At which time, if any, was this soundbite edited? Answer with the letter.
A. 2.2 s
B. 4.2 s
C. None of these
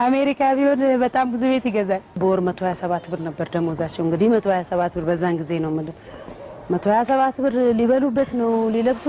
A